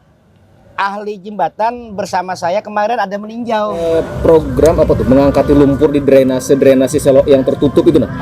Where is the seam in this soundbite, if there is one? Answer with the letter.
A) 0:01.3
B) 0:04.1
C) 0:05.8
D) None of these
B